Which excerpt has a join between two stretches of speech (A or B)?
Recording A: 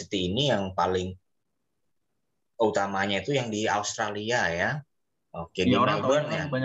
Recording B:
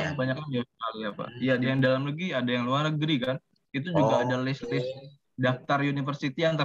B